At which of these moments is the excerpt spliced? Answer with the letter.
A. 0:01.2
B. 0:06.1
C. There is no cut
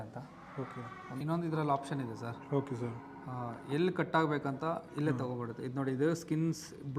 A